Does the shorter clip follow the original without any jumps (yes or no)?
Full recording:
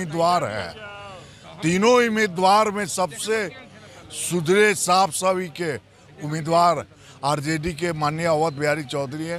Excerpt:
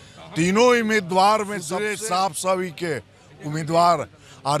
no